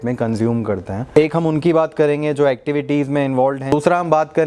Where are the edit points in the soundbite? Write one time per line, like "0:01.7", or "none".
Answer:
0:01.1
0:03.7